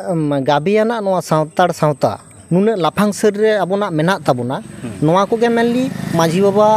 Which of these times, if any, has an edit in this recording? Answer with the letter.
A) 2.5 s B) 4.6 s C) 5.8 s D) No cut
A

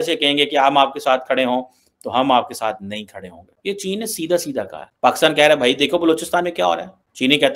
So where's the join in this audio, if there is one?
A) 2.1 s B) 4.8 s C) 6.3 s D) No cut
B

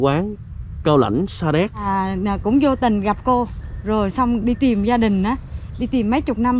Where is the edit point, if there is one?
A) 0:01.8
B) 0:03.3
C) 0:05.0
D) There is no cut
A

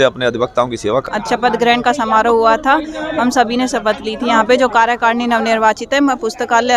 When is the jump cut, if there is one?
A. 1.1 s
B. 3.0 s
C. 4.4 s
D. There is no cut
A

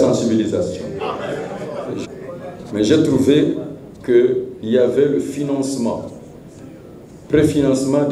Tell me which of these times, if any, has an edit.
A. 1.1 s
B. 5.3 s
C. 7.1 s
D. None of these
D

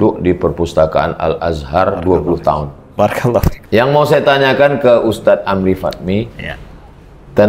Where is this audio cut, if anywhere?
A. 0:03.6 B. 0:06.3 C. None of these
A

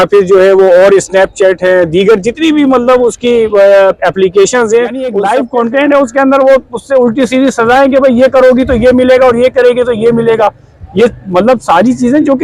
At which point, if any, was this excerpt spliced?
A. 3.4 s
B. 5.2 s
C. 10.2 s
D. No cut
B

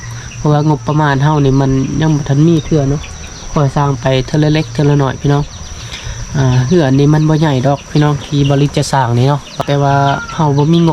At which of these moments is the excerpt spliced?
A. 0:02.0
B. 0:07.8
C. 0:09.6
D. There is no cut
C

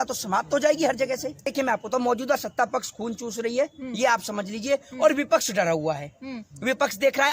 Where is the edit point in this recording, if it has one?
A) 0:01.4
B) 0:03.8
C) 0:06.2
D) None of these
A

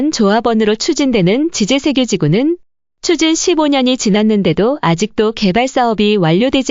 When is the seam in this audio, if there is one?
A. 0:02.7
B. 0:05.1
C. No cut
C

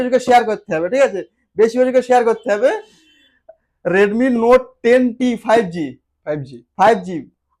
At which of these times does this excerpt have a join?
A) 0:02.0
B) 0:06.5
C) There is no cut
C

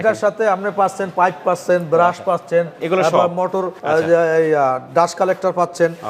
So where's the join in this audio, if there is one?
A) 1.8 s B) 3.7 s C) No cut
B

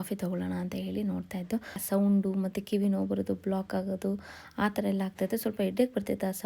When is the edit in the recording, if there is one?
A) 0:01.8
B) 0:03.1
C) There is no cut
A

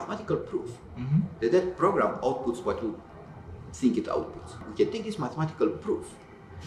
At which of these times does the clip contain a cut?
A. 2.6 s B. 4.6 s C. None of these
B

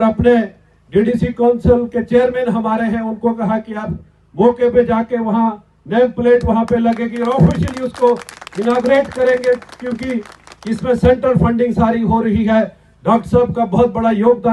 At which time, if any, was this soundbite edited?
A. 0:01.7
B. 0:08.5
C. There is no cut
C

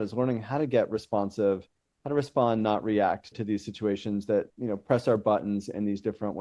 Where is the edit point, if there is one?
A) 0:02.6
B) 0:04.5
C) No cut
B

